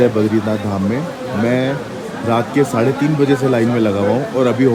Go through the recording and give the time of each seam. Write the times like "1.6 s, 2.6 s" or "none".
none